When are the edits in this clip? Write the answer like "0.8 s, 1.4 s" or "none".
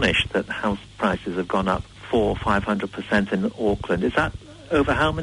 none